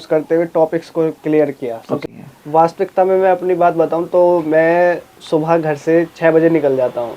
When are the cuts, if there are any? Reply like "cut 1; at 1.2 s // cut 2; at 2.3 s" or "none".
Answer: cut 1; at 2.0 s